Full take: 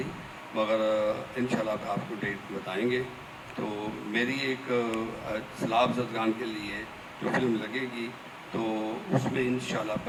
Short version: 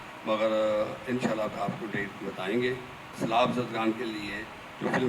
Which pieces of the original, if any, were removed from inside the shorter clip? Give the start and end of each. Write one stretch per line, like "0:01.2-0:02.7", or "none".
0:03.4-0:05.5